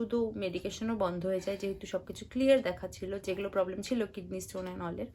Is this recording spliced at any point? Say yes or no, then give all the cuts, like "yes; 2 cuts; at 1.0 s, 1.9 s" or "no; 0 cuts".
no; 0 cuts